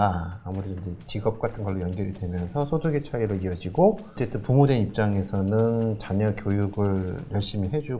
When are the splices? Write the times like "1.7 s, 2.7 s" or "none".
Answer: 4.2 s